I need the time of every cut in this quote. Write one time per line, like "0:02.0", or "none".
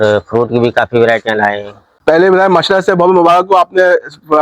0:01.9